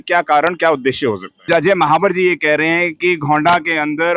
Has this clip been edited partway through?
yes; 1 cut; at 1.4 s

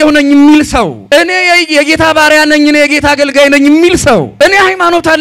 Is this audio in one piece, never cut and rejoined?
no; 2 cuts; at 1.0 s, 4.3 s

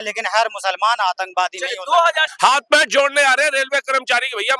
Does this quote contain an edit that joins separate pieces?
yes; 1 cut; at 2.3 s

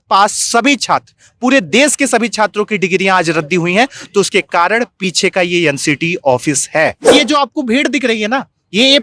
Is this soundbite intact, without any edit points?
no; 1 cut; at 7.1 s

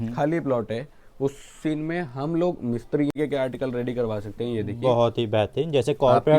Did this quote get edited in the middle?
yes; 1 cut; at 3.1 s

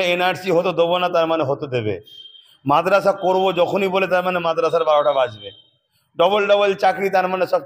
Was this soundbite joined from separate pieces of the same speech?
no; 0 cuts

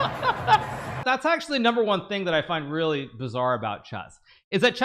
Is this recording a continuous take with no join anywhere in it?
no; 1 cut; at 1.0 s

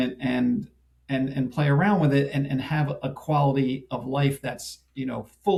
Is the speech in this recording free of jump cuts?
yes; 0 cuts

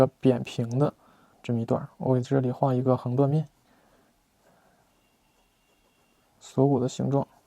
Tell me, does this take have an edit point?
yes; 2 cuts; at 3.6 s, 6.3 s

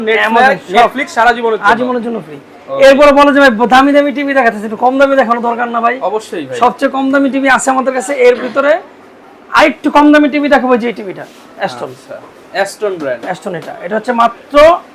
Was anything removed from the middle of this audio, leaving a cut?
no; 0 cuts

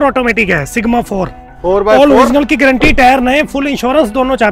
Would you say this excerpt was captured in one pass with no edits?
yes; 0 cuts

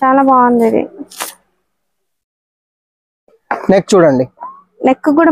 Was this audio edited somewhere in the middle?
no; 0 cuts

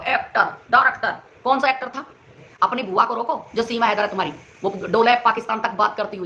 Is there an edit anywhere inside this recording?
yes; 1 cut; at 2.4 s

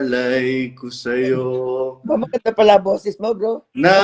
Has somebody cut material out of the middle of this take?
no; 0 cuts

